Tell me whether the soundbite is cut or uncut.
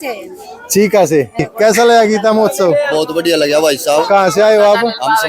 cut